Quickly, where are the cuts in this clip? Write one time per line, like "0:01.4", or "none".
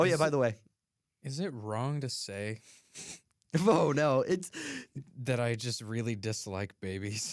none